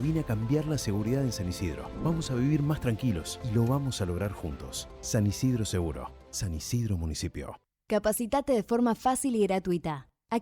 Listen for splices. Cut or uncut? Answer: cut